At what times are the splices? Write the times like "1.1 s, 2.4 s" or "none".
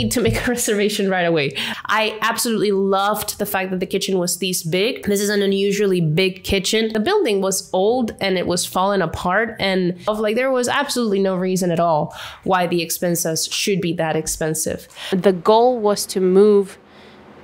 1.7 s, 6.9 s, 10.1 s, 15.1 s